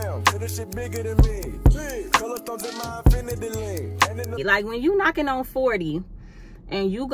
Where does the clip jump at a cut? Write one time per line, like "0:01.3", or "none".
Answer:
0:04.4